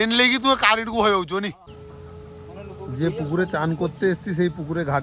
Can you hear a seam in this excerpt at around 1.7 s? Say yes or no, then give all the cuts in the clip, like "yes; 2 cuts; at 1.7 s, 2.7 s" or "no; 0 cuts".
yes; 1 cut; at 1.7 s